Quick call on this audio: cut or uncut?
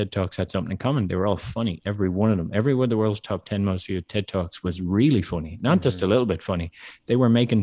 uncut